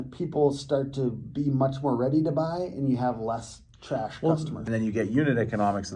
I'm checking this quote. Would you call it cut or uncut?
cut